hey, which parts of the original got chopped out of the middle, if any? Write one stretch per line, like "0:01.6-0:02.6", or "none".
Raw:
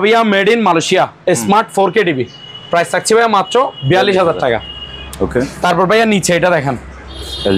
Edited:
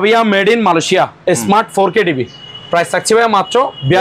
none